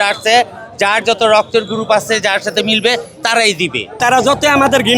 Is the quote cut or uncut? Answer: cut